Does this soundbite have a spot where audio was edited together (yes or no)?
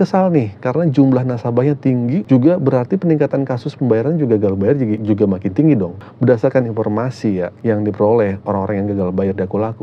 yes